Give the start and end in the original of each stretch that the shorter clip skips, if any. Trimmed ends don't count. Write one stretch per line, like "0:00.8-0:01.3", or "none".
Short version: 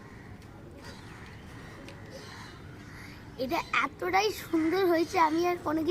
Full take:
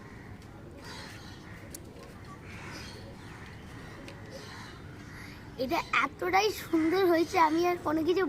0:00.9-0:03.1